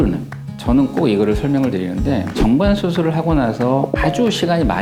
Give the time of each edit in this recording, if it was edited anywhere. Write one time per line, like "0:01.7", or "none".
none